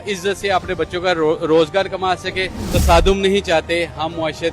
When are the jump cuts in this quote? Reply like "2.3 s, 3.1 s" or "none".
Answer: 2.6 s